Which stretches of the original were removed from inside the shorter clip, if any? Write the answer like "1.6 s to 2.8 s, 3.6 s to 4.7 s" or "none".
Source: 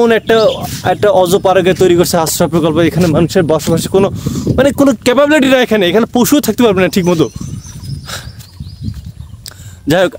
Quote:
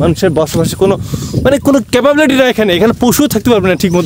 none

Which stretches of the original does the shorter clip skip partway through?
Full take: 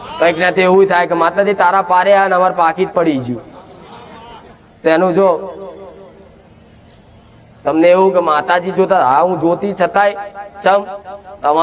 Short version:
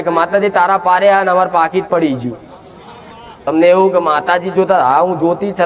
4.5 s to 7.7 s

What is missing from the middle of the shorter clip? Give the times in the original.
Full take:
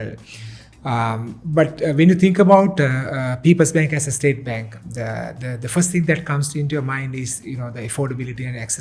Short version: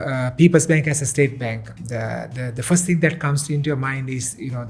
none

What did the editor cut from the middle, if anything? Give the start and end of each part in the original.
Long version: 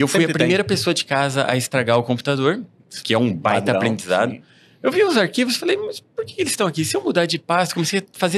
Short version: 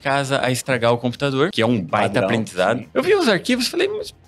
2.6 s to 3.1 s, 4.4 s to 4.7 s

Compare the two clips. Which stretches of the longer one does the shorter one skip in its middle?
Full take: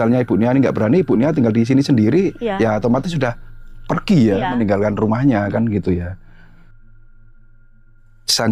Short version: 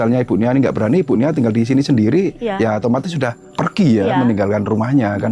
3.4 s to 3.8 s

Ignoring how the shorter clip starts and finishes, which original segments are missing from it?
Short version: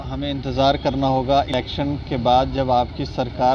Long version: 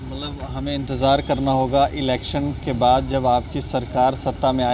1.9 s to 2.1 s

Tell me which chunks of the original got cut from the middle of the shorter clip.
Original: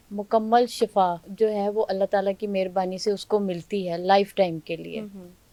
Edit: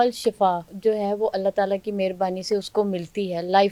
none

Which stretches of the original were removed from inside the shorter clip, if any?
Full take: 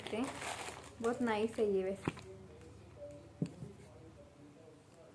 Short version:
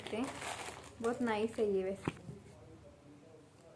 2.2 s to 3.5 s

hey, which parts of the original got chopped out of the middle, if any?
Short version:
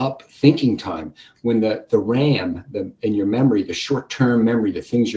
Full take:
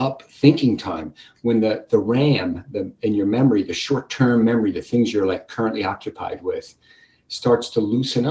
none

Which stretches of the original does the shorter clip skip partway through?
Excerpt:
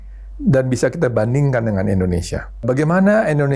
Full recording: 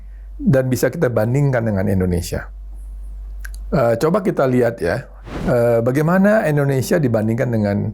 2.6 s to 5.8 s

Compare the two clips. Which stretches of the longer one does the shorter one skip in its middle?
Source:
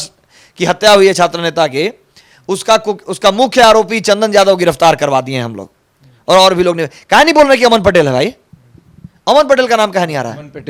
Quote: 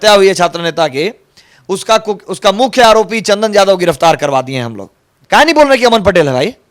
5.9 s to 6.9 s

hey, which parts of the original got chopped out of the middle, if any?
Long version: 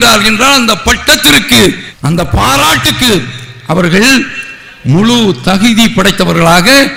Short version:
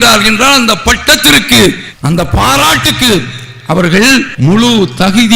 4.3 s to 4.8 s

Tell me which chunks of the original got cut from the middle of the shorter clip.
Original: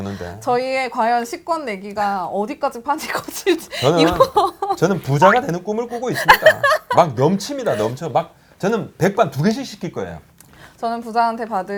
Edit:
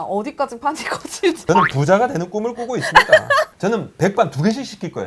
3.6 s to 4.7 s, 6.8 s to 8.5 s

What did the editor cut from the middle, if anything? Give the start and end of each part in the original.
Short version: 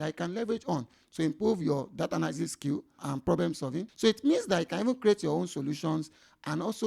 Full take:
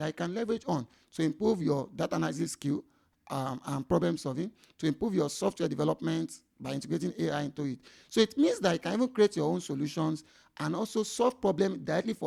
3.0 s to 3.6 s, 4.5 s to 8.0 s

